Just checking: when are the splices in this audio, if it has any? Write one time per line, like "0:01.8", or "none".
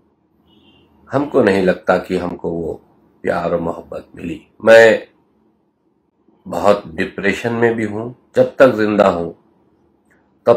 0:04.5
0:08.2

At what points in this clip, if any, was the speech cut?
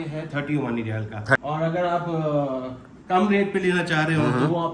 0:01.3

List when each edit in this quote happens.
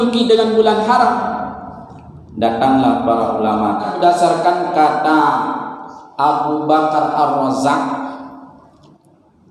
0:03.9

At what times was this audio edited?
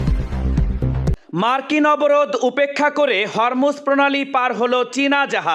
0:01.2

